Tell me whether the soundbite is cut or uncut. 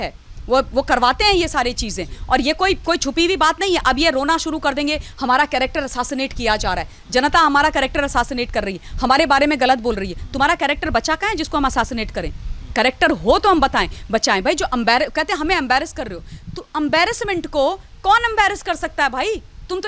uncut